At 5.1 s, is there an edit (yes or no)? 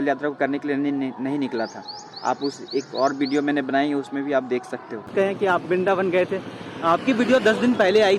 yes